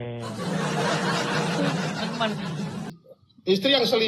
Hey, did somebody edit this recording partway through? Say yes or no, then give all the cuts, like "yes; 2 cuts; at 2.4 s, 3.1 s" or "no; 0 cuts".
yes; 1 cut; at 2.9 s